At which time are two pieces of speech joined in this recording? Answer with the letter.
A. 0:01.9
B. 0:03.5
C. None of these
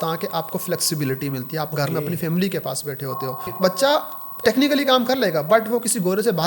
B